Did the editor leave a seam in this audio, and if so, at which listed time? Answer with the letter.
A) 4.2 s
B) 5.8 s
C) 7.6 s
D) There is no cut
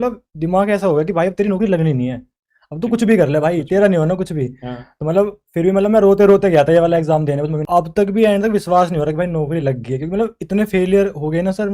C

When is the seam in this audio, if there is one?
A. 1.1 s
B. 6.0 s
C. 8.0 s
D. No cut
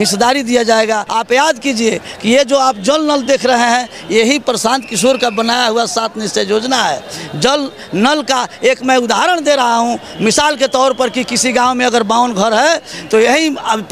A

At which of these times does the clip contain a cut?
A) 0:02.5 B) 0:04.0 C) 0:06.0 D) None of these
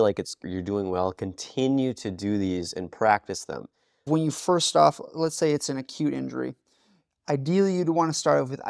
B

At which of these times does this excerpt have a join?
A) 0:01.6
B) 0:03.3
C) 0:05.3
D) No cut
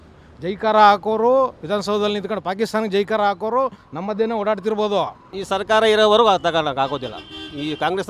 C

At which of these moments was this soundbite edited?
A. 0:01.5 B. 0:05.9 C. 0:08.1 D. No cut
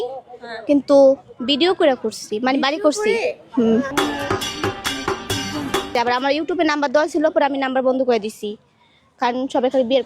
B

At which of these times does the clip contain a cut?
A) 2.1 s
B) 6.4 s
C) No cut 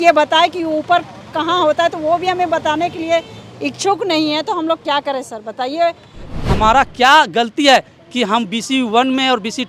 B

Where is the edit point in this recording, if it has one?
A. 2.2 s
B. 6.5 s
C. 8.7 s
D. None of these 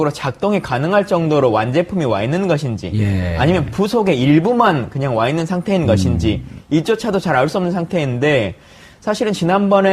B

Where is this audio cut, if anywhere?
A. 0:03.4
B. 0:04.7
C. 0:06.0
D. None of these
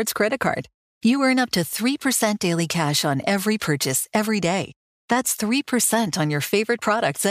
D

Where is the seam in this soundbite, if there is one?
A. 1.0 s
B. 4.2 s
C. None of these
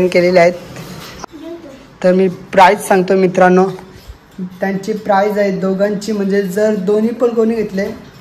A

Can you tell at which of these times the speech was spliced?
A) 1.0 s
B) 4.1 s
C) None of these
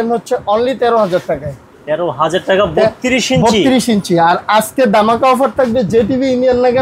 C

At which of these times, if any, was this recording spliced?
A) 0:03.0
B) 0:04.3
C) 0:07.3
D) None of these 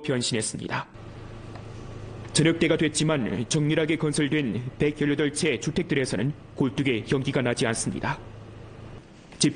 B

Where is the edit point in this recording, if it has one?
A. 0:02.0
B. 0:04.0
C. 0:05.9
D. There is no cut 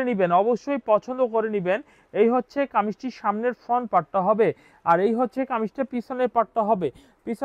D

